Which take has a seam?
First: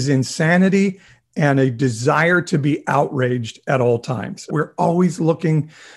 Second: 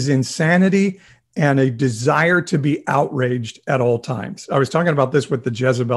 first; 1 cut; at 4.4 s

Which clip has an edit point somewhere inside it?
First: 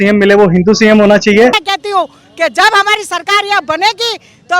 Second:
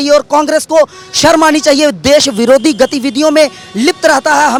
first; 1 cut; at 1.6 s

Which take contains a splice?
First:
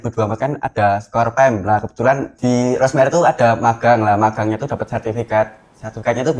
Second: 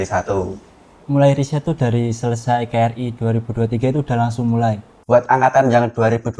second; 2 cuts; at 1.0 s, 4.9 s

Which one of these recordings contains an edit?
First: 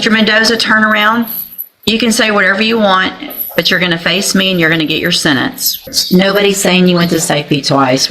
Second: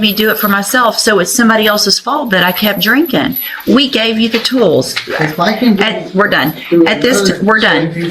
first; 1 cut; at 5.9 s

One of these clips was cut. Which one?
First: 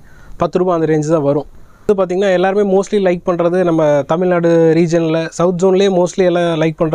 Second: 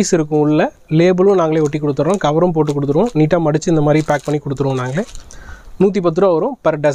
first; 1 cut; at 1.9 s

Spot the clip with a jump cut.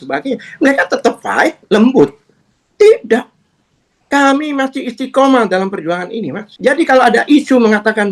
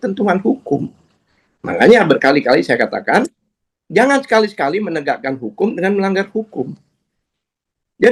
first; 2 cuts; at 1.6 s, 6.4 s

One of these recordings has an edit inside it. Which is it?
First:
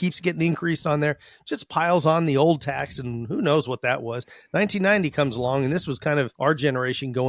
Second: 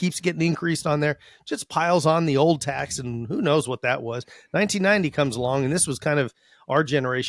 first; 1 cut; at 6.3 s

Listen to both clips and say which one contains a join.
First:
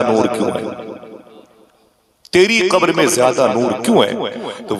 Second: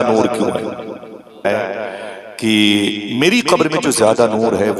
second; 1 cut; at 1.4 s

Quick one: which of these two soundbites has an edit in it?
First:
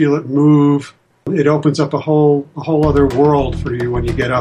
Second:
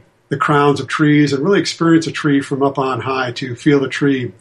first; 1 cut; at 1.3 s

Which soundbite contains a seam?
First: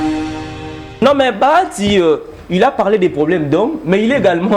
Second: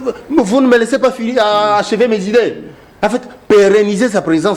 first; 1 cut; at 1.0 s

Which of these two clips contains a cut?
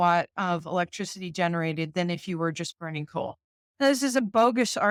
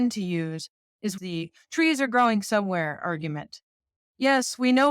second; 1 cut; at 1.2 s

